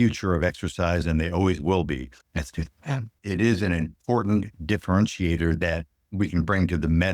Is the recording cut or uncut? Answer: cut